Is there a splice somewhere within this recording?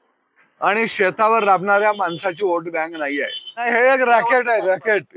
yes; 1 cut; at 3.6 s

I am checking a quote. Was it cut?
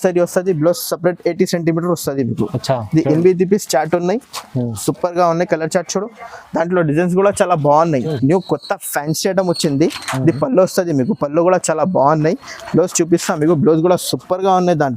yes; 1 cut; at 8.1 s

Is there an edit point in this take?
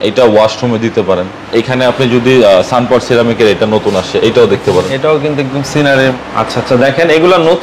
yes; 2 cuts; at 1.4 s, 6.2 s

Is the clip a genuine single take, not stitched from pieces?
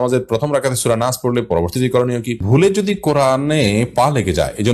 no; 1 cut; at 2.4 s

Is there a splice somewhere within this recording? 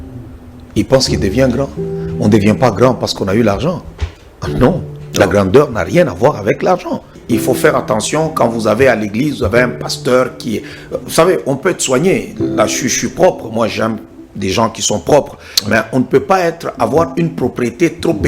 yes; 1 cut; at 7.2 s

